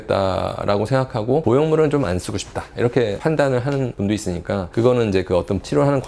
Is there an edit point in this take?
no; 0 cuts

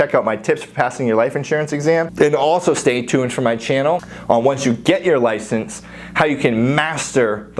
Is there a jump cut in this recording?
yes; 2 cuts; at 2.1 s, 4.1 s

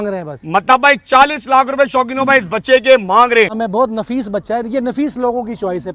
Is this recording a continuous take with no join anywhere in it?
no; 1 cut; at 3.6 s

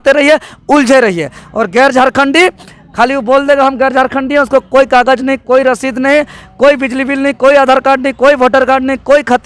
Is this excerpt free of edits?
yes; 0 cuts

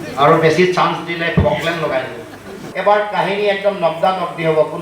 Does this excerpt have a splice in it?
yes; 1 cut; at 2.6 s

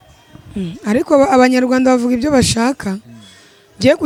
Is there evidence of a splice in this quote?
no; 0 cuts

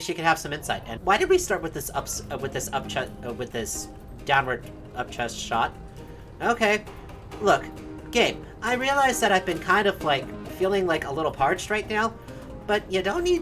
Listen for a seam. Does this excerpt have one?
yes; 2 cuts; at 0.9 s, 10.4 s

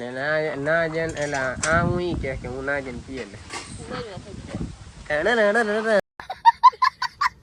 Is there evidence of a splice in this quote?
yes; 1 cut; at 6.2 s

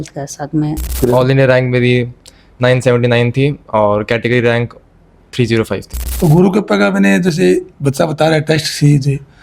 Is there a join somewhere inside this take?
yes; 2 cuts; at 1.0 s, 6.1 s

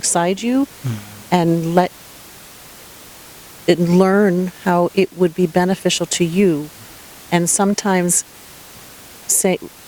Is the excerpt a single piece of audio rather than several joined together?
yes; 0 cuts

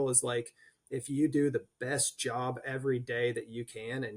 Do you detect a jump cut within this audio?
no; 0 cuts

